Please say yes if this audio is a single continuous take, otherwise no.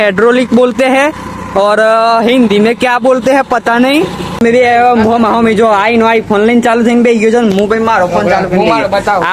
no